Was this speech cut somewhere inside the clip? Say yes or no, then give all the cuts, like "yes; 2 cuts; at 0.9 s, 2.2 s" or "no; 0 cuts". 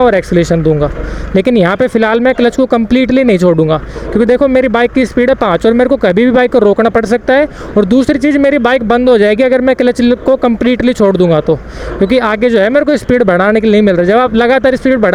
no; 0 cuts